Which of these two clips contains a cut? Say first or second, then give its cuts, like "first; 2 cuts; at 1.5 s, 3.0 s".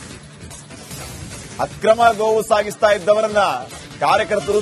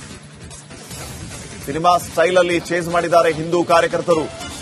second; 1 cut; at 1.4 s